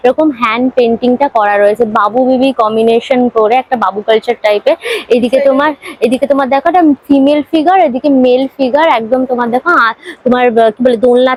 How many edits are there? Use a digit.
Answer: 0